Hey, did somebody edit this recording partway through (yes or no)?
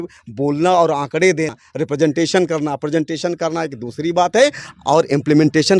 yes